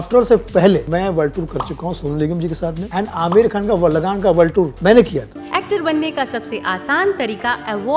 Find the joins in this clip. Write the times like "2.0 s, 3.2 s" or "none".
0.9 s, 2.8 s, 4.7 s, 5.4 s